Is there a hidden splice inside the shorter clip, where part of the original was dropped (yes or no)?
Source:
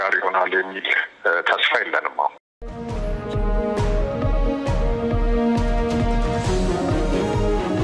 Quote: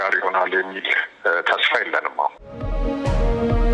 yes